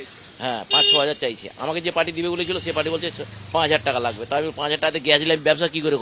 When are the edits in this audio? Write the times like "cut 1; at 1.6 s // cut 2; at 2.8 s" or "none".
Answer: none